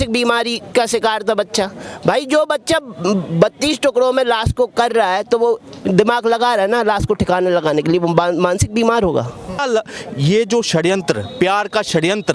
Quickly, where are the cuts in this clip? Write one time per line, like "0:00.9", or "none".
0:09.6